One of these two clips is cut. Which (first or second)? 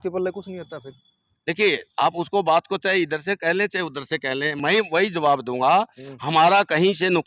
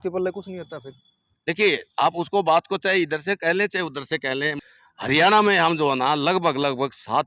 second